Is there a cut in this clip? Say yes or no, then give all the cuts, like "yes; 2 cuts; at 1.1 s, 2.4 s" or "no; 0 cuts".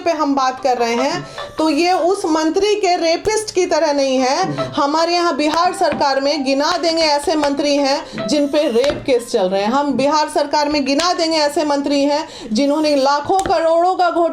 no; 0 cuts